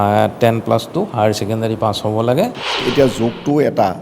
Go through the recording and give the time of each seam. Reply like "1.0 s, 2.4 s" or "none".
2.8 s